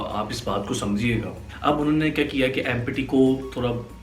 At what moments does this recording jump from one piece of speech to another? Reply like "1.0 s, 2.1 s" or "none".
1.4 s

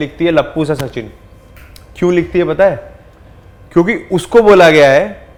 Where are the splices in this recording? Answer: none

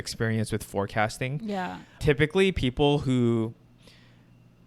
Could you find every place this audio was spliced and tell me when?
none

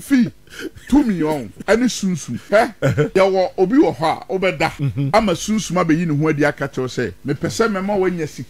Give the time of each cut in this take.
1.5 s, 2.7 s, 4.9 s, 7.2 s

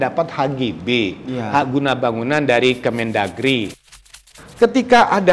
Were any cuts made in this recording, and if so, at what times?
3.9 s

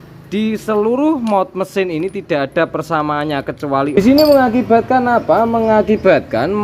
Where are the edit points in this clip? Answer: 4.0 s

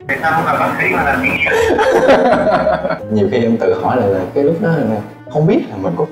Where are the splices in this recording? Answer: 3.0 s

